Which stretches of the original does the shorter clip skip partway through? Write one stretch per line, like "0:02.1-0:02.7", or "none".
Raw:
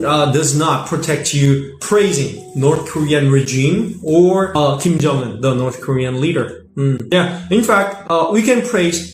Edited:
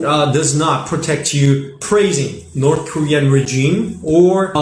none